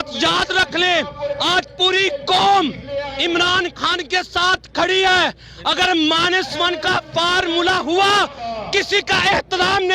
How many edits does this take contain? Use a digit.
1